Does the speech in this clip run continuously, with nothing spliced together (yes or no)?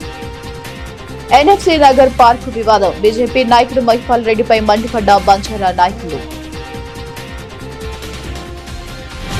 yes